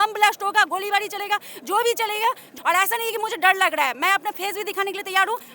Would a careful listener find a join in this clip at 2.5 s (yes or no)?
yes